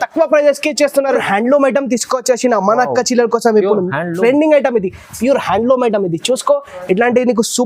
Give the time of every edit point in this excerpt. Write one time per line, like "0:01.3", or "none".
0:01.2